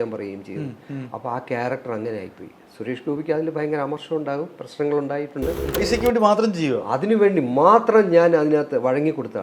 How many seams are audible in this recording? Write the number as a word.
one